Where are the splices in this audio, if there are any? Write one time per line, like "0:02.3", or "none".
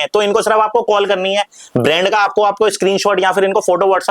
none